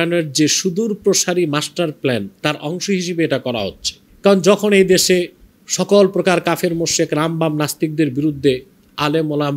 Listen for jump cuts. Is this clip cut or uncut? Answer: uncut